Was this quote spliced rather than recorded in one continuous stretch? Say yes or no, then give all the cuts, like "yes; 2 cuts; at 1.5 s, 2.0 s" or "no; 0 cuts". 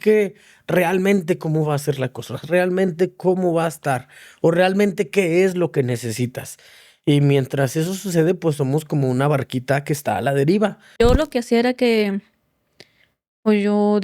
yes; 1 cut; at 10.8 s